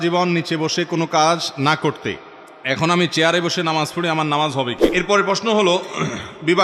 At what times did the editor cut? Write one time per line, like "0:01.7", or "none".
0:04.8